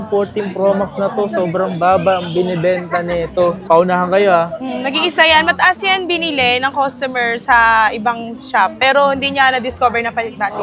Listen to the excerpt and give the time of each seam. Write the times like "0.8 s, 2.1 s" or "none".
none

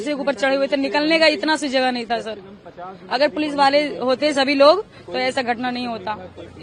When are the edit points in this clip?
none

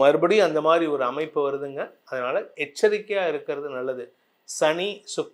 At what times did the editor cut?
none

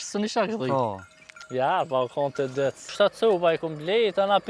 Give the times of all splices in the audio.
2.8 s

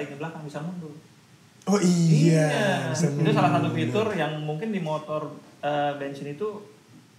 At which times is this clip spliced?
none

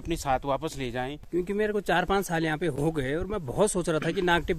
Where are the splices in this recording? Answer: 1.1 s

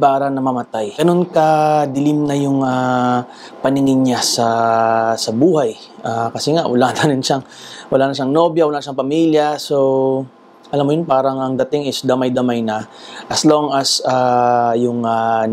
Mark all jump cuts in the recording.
0.9 s

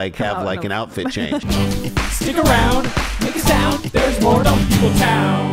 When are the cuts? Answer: 1.4 s

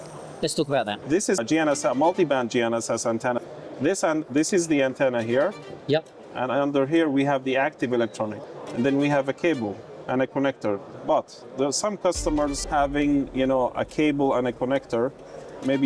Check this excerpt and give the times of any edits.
1.2 s, 3.4 s, 8.4 s, 10.9 s, 12.6 s

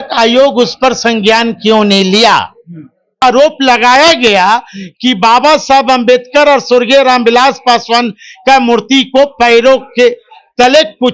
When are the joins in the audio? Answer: 3.2 s

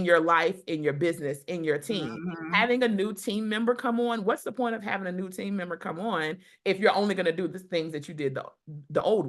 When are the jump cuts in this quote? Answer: none

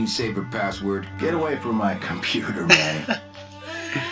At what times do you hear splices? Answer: none

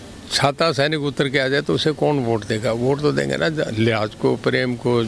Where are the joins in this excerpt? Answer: none

